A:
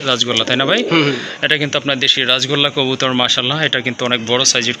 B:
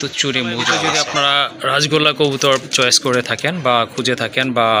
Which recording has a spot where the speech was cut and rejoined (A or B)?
B